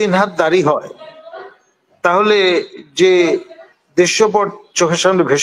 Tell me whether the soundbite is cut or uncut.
uncut